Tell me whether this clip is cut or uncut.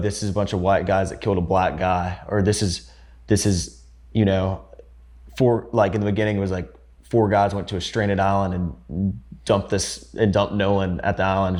uncut